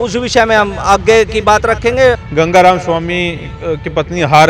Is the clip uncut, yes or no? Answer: no